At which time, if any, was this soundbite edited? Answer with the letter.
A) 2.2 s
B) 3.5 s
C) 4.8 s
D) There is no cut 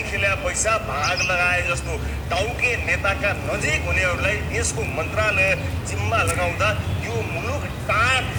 D